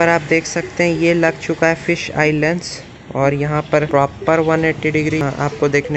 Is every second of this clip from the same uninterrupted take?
no; 2 cuts; at 3.9 s, 5.2 s

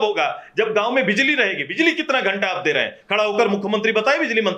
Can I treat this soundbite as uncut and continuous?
yes; 0 cuts

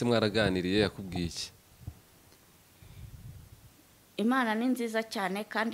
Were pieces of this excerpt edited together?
no; 0 cuts

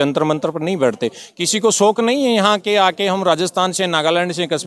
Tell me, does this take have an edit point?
no; 0 cuts

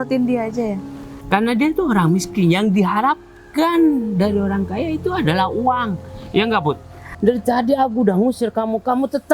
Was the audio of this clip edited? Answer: yes; 1 cut; at 7.0 s

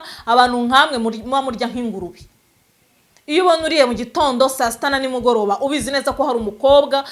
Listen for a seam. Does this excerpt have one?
no; 0 cuts

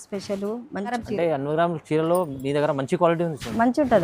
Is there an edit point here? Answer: yes; 1 cut; at 0.9 s

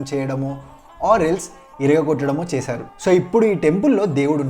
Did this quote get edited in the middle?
yes; 1 cut; at 2.8 s

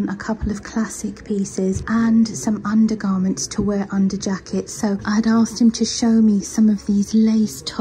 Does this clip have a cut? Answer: no; 0 cuts

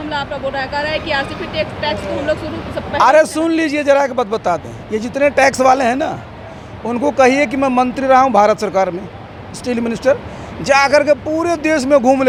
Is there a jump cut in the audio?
no; 0 cuts

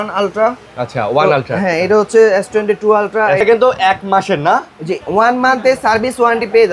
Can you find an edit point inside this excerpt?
yes; 1 cut; at 3.4 s

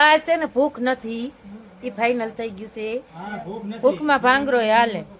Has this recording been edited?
no; 0 cuts

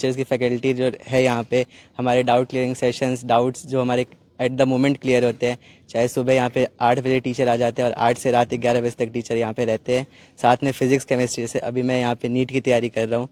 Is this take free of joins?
yes; 0 cuts

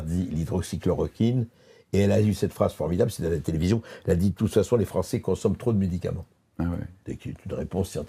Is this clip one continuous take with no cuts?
yes; 0 cuts

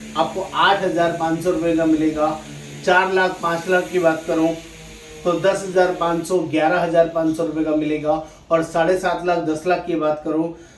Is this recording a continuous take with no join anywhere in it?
yes; 0 cuts

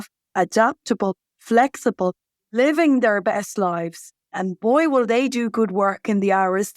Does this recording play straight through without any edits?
no; 1 cut; at 4.4 s

